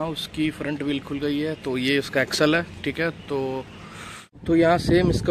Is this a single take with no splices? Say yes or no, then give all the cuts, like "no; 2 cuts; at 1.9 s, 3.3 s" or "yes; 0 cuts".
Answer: yes; 0 cuts